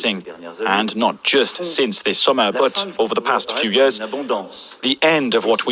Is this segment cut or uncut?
uncut